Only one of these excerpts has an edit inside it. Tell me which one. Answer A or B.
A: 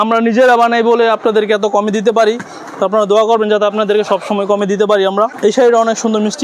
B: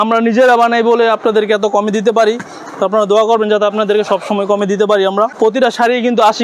B